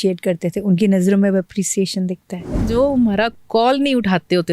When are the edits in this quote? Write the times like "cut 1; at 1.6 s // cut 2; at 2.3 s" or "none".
cut 1; at 2.6 s